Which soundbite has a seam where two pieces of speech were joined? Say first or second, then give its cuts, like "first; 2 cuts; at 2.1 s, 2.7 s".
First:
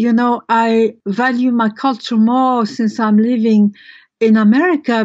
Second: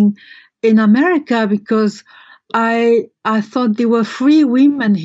first; 1 cut; at 1.0 s